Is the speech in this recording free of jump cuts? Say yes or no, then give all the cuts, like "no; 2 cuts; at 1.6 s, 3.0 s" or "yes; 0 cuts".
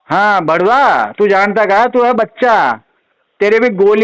yes; 0 cuts